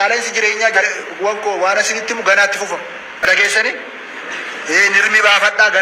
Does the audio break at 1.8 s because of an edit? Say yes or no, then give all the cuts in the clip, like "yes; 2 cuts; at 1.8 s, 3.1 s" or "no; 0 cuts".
no; 1 cut; at 3.3 s